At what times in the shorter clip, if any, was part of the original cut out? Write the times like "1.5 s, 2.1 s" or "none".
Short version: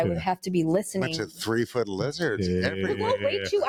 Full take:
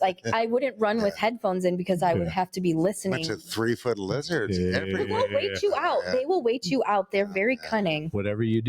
none